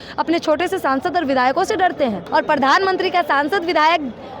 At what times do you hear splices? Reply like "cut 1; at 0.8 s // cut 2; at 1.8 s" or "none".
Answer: cut 1; at 2.2 s